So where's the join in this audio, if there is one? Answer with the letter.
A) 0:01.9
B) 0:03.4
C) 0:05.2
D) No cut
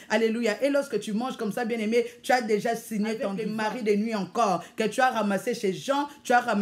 B